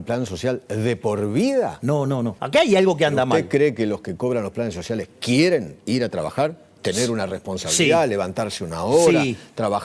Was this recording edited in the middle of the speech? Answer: yes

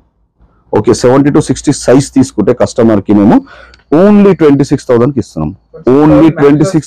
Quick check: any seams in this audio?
no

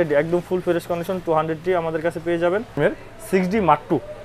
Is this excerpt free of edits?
no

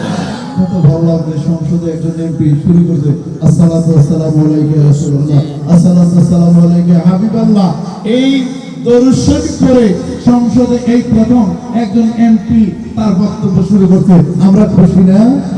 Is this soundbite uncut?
yes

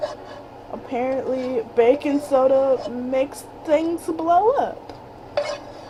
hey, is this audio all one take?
yes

